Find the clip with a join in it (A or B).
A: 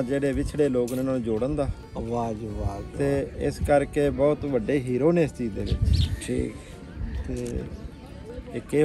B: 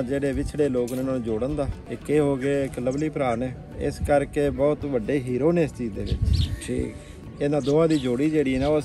B